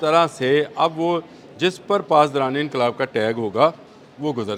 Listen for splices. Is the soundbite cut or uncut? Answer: uncut